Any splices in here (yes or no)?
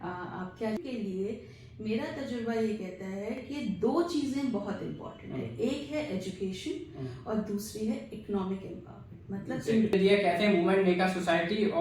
yes